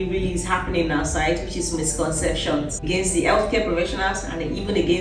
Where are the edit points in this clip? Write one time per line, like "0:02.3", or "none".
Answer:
0:02.9